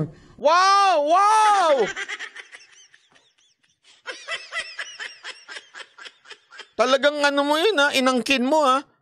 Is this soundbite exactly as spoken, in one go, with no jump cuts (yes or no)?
yes